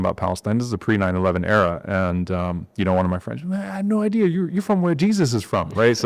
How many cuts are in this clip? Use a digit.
0